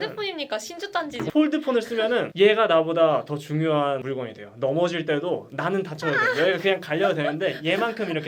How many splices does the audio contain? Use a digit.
2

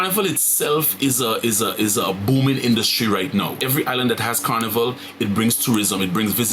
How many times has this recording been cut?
1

